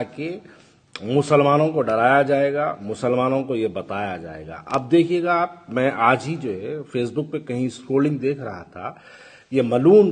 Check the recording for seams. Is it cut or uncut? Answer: uncut